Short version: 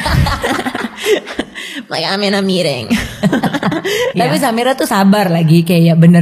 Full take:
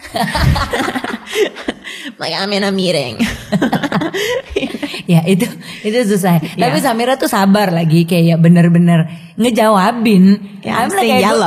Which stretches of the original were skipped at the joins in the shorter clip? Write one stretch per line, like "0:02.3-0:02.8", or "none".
0:04.4-0:06.5